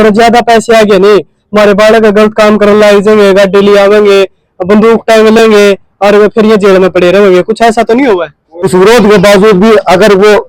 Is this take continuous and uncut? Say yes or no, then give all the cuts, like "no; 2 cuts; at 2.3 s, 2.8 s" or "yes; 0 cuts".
no; 1 cut; at 8.7 s